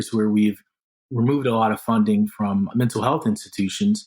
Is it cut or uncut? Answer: cut